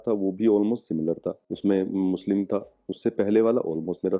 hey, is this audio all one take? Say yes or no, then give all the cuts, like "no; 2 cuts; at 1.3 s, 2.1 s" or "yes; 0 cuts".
yes; 0 cuts